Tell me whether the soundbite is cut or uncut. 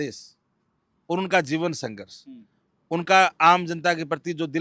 uncut